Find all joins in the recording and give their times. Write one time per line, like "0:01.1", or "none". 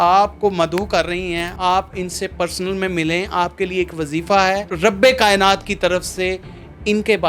0:01.5
0:04.7